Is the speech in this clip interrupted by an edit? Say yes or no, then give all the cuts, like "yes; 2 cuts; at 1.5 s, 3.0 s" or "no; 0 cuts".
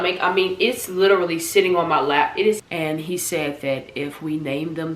yes; 1 cut; at 2.6 s